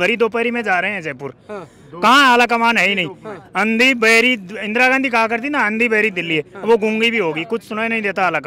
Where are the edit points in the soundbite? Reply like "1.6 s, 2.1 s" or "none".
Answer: none